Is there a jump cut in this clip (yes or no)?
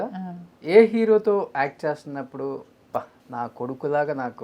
yes